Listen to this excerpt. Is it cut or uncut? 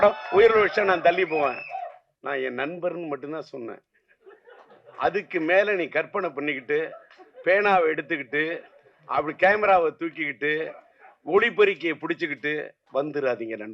cut